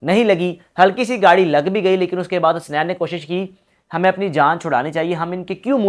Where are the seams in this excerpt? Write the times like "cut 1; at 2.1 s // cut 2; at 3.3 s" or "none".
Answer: none